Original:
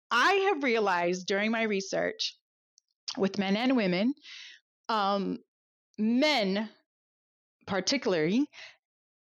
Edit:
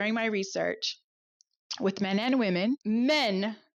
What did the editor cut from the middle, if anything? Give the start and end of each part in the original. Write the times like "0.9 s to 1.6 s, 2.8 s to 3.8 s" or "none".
4.2 s to 5.9 s